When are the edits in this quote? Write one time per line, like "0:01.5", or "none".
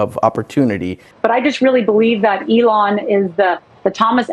0:01.1